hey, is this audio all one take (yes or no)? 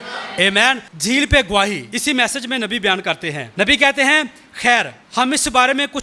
no